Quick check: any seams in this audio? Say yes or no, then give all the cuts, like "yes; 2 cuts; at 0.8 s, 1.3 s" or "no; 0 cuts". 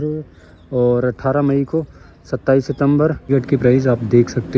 yes; 1 cut; at 3.2 s